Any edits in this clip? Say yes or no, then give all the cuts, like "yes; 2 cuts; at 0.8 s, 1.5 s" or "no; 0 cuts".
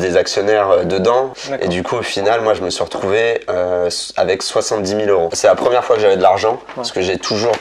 yes; 2 cuts; at 1.4 s, 5.3 s